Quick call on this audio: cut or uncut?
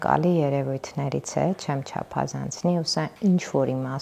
uncut